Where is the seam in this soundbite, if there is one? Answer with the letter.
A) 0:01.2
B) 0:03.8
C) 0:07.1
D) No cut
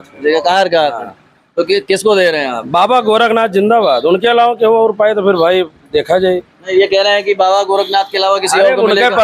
D